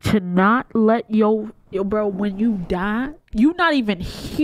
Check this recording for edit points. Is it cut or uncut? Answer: cut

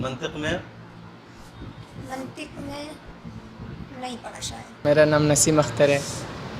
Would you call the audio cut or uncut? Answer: cut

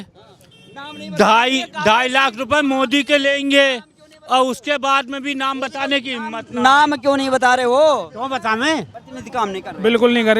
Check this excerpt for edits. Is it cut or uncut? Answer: cut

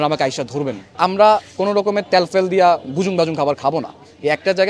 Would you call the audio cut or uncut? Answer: cut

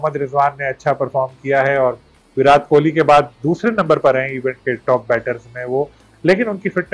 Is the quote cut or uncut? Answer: uncut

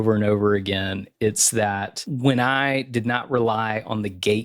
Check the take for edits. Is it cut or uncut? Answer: cut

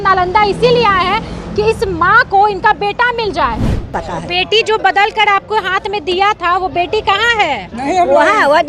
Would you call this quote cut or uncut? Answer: cut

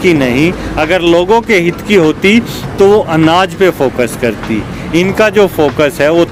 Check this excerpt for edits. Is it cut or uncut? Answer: uncut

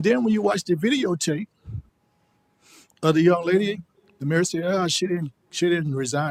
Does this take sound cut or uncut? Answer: uncut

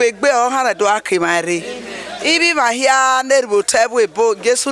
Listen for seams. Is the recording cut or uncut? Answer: uncut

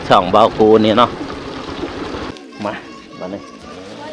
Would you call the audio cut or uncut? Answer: cut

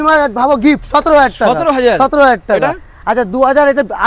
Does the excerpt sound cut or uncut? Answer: uncut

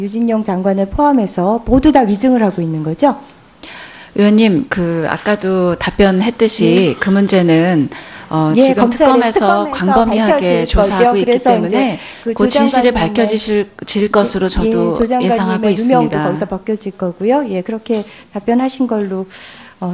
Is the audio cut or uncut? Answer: uncut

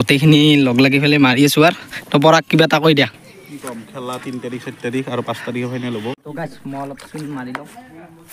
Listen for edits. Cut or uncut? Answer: cut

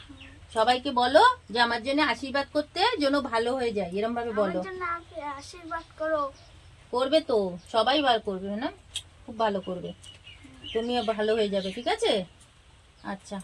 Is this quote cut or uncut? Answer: uncut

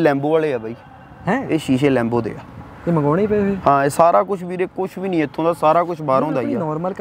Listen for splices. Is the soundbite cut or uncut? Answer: uncut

